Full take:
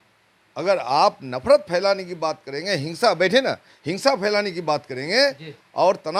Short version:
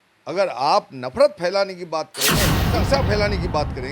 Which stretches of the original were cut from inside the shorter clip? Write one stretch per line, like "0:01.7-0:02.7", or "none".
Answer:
0:02.9-0:03.7